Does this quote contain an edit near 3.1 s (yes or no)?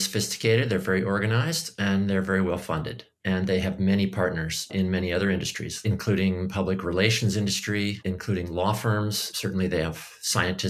no